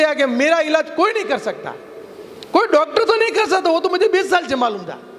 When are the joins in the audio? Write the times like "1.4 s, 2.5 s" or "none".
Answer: none